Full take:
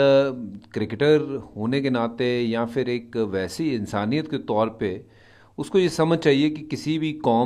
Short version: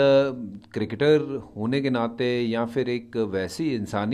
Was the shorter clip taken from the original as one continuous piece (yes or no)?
yes